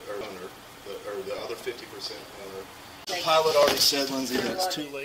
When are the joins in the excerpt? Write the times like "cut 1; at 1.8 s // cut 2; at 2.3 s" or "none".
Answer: cut 1; at 3.0 s